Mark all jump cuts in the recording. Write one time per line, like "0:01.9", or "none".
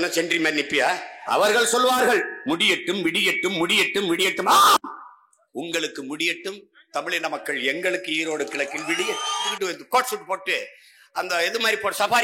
0:01.2
0:09.5